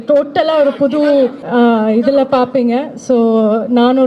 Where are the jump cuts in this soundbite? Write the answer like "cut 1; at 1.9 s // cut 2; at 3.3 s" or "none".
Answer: cut 1; at 1.4 s